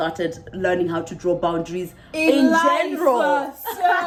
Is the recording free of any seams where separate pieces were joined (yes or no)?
yes